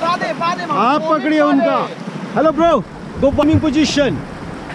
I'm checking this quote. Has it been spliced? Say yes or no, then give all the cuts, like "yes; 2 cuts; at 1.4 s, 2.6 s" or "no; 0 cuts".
yes; 1 cut; at 3.4 s